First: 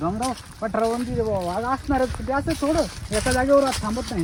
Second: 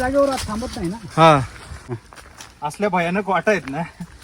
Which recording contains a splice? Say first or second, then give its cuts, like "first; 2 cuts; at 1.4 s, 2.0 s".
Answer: second; 1 cut; at 1.9 s